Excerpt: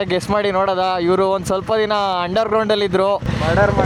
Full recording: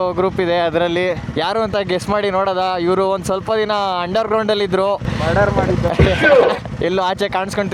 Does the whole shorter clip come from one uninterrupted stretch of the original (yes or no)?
yes